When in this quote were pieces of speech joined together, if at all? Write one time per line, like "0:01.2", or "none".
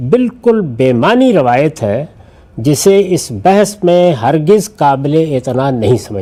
none